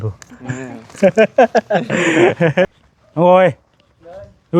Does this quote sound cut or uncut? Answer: cut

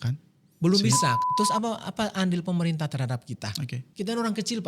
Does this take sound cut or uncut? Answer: cut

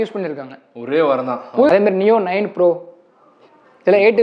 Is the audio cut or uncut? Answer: cut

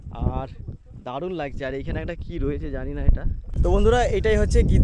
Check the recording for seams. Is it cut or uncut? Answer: cut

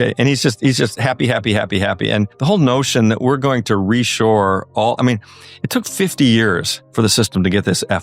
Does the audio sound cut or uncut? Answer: cut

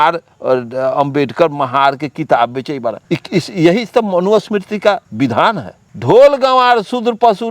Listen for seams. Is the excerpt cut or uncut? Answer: cut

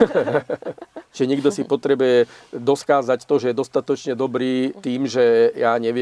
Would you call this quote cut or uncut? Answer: cut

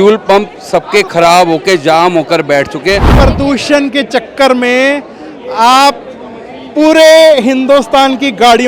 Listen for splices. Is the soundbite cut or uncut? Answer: cut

